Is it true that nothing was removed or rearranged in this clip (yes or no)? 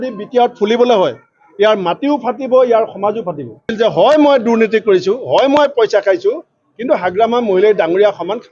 no